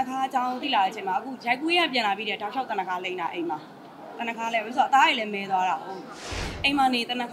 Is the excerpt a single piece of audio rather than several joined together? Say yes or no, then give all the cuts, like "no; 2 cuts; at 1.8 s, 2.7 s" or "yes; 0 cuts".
no; 1 cut; at 6.3 s